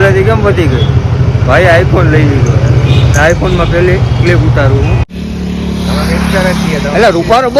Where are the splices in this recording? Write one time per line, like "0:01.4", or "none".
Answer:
0:05.1